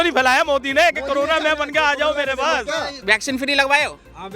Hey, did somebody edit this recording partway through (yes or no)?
yes